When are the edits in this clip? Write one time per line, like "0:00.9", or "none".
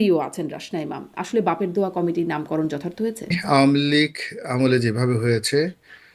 0:03.4